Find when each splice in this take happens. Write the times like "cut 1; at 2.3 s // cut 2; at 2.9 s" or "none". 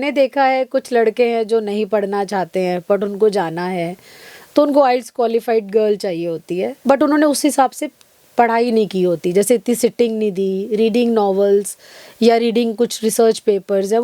cut 1; at 6.7 s